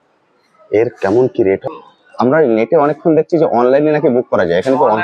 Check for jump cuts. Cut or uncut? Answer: cut